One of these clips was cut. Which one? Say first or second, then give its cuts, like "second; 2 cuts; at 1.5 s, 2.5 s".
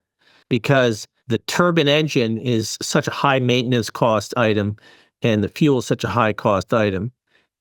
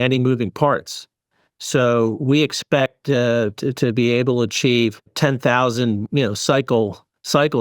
second; 1 cut; at 5.1 s